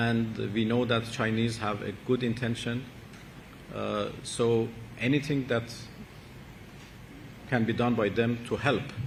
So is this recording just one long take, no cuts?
yes; 0 cuts

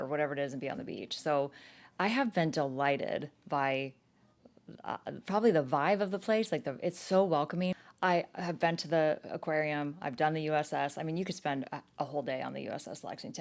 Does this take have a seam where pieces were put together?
yes; 1 cut; at 7.7 s

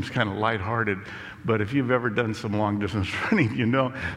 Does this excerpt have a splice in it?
no; 0 cuts

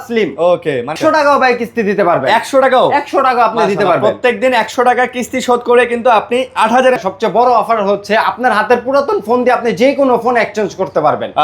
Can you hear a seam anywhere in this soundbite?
yes; 2 cuts; at 1.0 s, 7.0 s

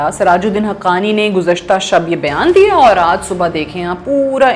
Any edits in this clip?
no; 0 cuts

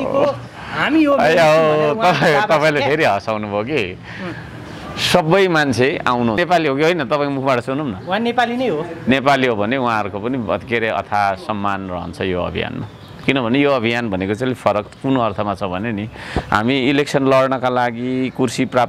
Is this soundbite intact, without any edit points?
no; 1 cut; at 6.4 s

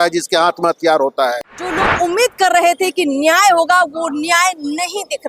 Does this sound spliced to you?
yes; 1 cut; at 1.8 s

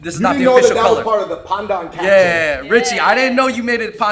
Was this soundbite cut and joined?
no; 0 cuts

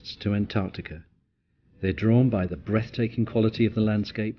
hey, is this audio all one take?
no; 1 cut; at 1.9 s

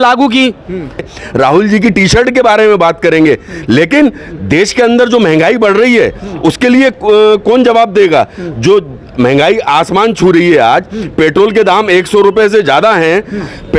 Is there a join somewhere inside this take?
yes; 1 cut; at 1.0 s

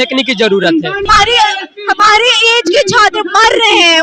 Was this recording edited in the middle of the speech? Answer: yes; 1 cut; at 1.1 s

